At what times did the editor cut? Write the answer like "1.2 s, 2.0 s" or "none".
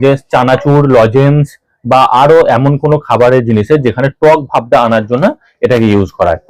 none

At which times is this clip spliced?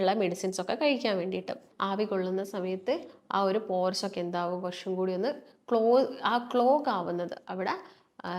1.6 s

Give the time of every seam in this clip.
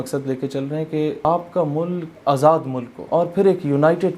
1.2 s, 2.1 s, 2.9 s

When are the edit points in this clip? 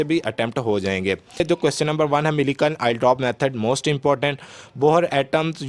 1.4 s

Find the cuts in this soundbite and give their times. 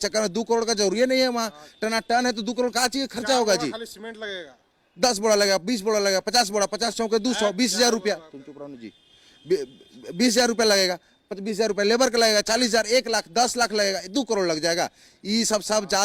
none

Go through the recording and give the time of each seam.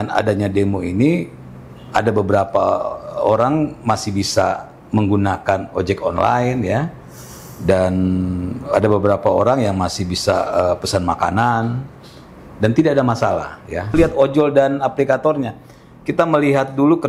14.0 s

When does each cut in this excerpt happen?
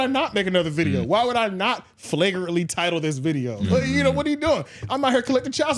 none

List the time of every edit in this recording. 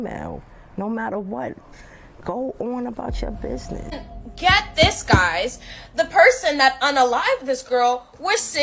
4.1 s

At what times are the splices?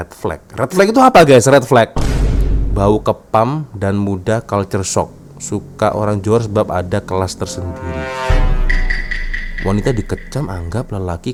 none

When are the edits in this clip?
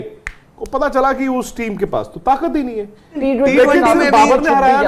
3.2 s

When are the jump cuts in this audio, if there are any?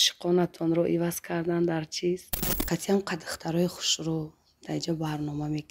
2.3 s

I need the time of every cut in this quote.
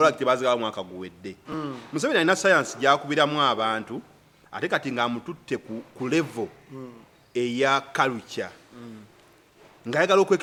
none

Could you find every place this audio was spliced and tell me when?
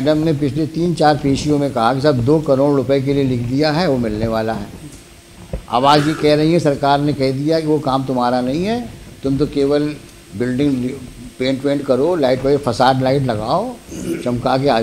none

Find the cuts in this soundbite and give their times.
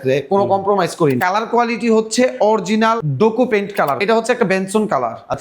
1.2 s, 3.1 s, 4.0 s

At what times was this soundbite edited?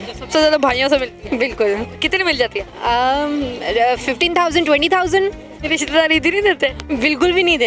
5.5 s

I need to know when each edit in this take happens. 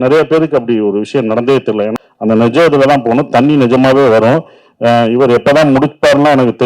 2.0 s

